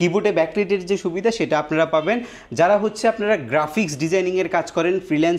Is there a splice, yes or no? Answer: no